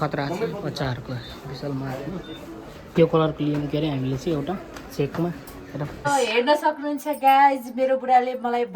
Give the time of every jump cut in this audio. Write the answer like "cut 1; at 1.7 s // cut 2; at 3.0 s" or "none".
cut 1; at 2.9 s // cut 2; at 5.9 s